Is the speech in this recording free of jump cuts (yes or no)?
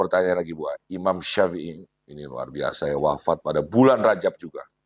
yes